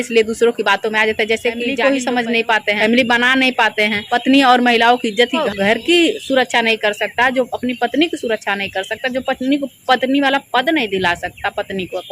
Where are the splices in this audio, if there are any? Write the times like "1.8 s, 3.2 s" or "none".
1.8 s